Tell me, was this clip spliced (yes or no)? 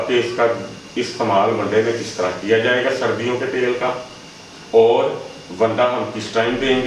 no